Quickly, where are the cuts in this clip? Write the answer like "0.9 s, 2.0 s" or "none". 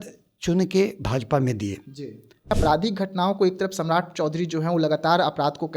2.5 s